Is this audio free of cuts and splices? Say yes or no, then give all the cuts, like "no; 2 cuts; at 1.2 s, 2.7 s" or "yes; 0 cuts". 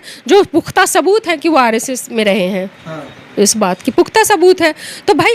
yes; 0 cuts